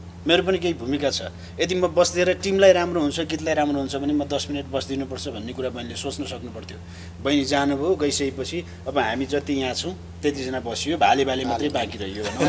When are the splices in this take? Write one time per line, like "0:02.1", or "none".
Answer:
none